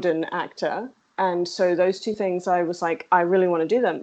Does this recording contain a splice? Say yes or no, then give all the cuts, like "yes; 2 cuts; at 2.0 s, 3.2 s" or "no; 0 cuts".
yes; 1 cut; at 1.0 s